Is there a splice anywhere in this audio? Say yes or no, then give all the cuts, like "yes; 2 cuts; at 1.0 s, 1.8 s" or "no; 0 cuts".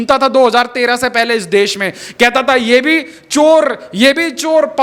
no; 0 cuts